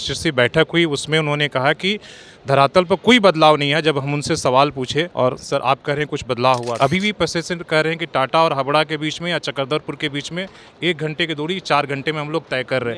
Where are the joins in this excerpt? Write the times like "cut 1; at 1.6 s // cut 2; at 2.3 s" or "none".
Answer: none